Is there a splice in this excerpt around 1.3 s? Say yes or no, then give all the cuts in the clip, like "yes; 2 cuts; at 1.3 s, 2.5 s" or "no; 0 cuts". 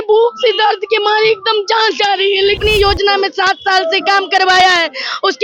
no; 1 cut; at 2.6 s